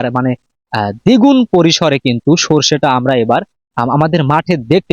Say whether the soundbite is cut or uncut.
uncut